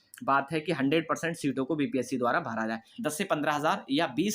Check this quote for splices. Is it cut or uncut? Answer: cut